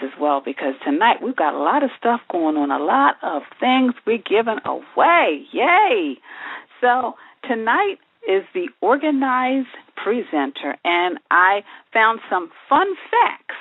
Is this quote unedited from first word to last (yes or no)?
no